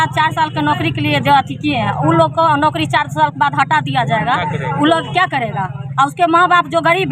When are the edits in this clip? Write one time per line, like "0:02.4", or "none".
none